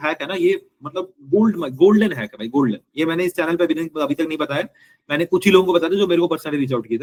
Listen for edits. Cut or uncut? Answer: uncut